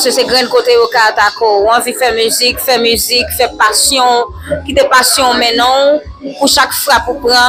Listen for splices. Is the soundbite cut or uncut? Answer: uncut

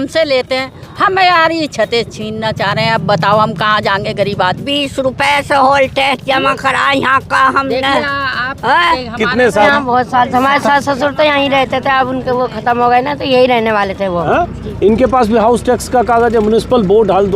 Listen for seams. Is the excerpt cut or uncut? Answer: cut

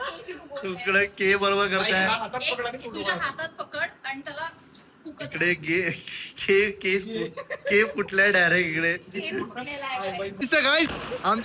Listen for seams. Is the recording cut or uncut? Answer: cut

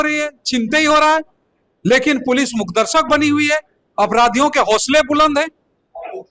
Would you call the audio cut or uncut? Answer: uncut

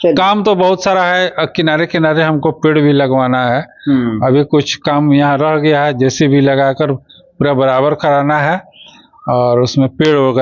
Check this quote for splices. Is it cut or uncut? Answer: uncut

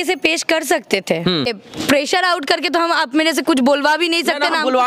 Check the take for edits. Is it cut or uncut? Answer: cut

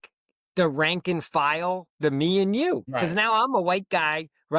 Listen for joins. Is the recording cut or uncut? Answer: cut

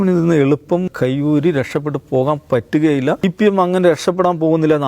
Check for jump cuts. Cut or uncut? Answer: cut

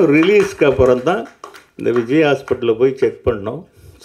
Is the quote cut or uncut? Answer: uncut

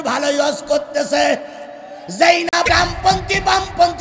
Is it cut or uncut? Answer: cut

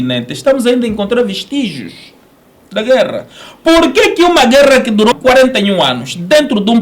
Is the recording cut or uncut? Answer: cut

